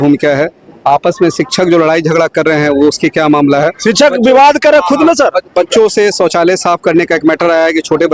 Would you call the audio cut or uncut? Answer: uncut